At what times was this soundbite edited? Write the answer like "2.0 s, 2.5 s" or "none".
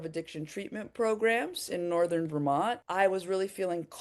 2.8 s